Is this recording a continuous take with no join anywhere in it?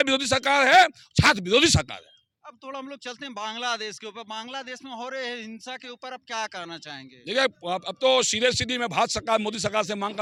yes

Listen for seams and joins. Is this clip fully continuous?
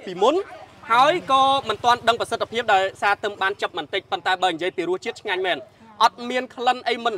yes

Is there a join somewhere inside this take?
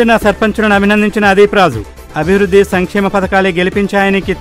no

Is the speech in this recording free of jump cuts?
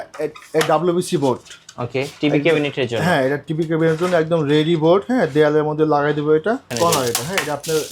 no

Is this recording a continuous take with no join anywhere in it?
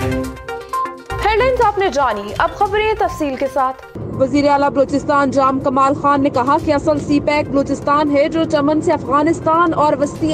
yes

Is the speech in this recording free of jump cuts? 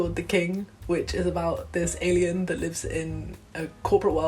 yes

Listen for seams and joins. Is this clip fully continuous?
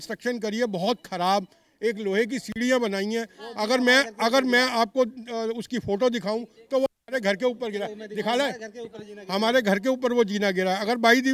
yes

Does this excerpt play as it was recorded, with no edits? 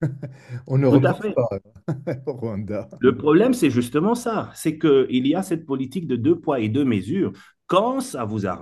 yes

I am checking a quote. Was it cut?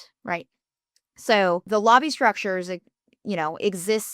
yes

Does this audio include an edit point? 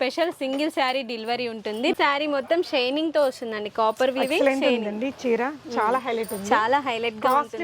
yes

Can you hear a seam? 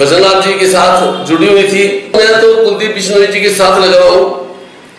yes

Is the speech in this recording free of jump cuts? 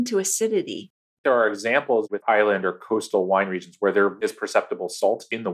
no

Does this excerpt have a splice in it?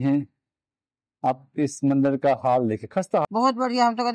yes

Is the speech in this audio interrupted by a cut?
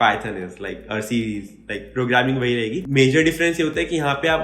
yes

